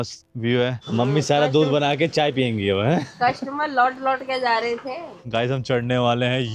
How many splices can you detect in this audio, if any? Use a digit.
2